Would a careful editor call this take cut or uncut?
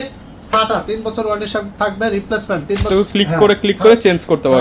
cut